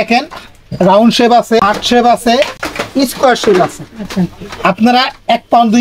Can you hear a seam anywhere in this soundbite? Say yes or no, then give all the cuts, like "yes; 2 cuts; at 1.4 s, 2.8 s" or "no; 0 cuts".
yes; 1 cut; at 1.6 s